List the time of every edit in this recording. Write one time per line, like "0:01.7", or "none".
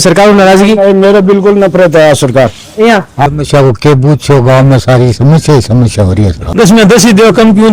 0:03.3
0:06.5